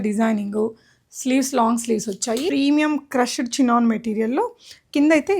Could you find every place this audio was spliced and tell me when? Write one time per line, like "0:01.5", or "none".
0:02.5